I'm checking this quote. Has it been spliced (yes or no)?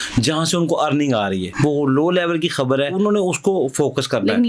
yes